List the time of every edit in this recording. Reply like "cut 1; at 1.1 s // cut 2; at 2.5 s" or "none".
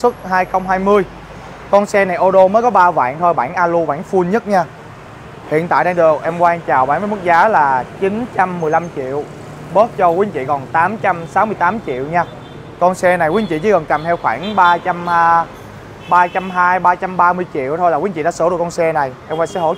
none